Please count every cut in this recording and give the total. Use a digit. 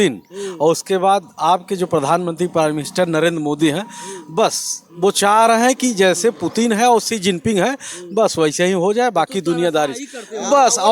0